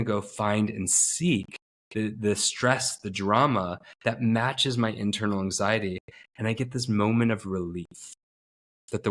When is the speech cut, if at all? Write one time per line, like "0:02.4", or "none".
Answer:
none